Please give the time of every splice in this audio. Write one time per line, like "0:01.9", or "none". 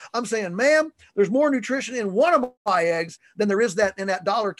none